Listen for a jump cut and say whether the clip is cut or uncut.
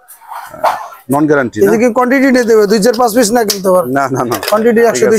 uncut